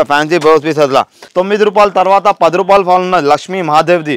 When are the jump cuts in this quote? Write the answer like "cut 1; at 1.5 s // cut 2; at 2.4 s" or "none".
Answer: cut 1; at 1.2 s